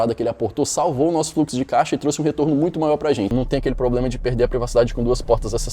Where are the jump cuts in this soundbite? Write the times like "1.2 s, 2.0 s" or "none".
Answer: 3.3 s